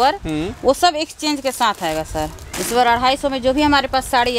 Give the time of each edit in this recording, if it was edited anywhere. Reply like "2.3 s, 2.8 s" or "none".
2.5 s